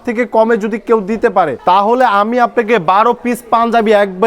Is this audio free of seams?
no; 1 cut; at 1.5 s

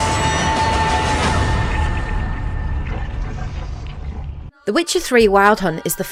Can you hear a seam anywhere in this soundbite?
no; 0 cuts

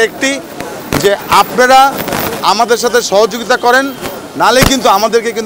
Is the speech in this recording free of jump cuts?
yes; 0 cuts

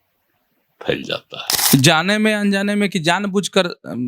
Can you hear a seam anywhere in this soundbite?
yes; 1 cut; at 1.5 s

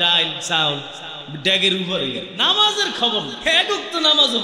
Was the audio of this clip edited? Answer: yes; 2 cuts; at 2.3 s, 3.3 s

